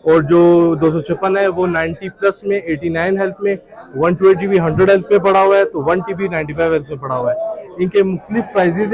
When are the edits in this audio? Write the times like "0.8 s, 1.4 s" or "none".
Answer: none